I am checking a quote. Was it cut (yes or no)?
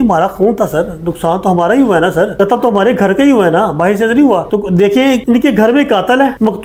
no